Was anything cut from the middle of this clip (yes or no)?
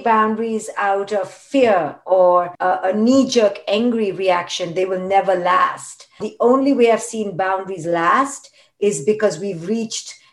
yes